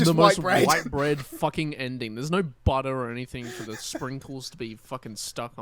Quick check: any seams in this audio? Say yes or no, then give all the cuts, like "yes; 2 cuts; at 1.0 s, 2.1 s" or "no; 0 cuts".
no; 0 cuts